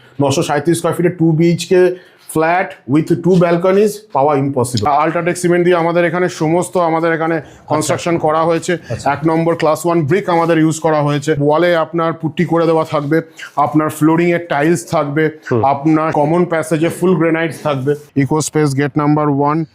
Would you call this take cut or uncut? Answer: cut